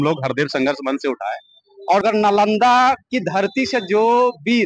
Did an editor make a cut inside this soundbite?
yes; 1 cut; at 2.0 s

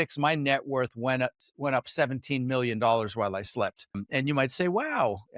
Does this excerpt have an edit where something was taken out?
yes; 2 cuts; at 1.4 s, 4.0 s

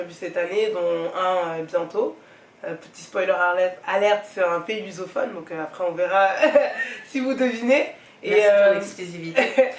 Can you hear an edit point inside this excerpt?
no; 0 cuts

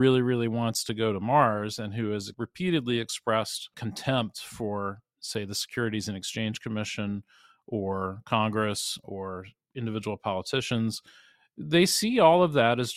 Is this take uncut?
no; 2 cuts; at 2.4 s, 3.8 s

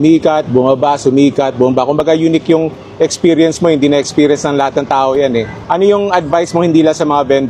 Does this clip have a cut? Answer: no; 0 cuts

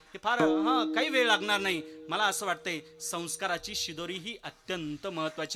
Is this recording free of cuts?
yes; 0 cuts

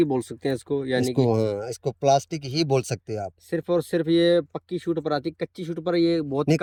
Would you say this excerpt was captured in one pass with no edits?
yes; 0 cuts

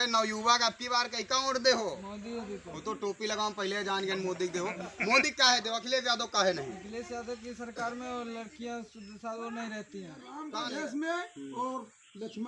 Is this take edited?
yes; 1 cut; at 10.4 s

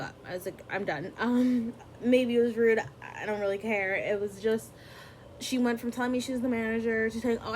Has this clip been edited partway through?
no; 0 cuts

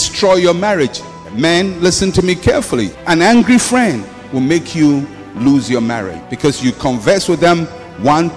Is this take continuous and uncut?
yes; 0 cuts

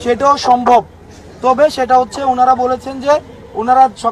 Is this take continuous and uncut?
yes; 0 cuts

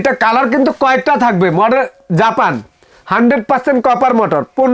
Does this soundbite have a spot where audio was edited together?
no; 0 cuts

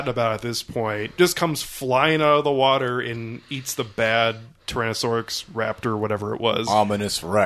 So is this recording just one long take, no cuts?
yes; 0 cuts

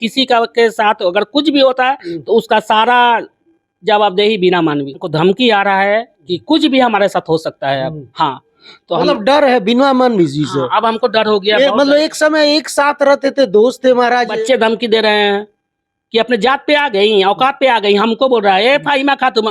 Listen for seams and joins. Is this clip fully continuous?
no; 2 cuts; at 5.1 s, 14.3 s

